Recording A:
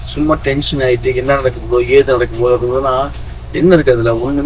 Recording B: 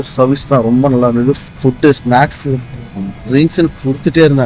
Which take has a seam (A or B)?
B